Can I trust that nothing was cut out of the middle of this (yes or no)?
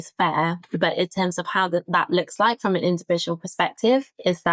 yes